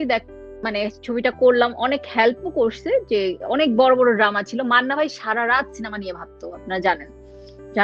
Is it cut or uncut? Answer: uncut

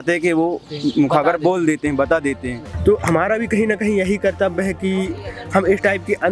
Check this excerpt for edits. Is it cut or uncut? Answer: cut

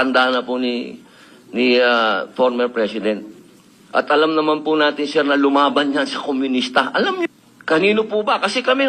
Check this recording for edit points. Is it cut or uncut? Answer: cut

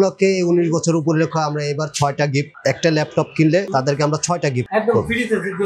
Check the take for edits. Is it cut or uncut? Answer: cut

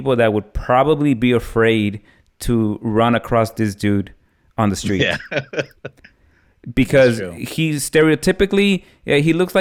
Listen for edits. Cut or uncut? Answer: uncut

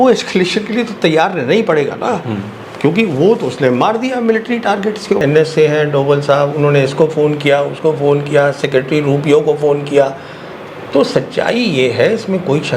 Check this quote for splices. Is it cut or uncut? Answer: cut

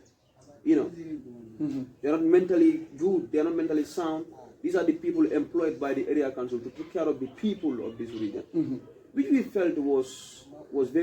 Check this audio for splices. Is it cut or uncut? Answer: uncut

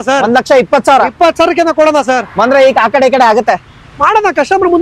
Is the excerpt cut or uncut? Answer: uncut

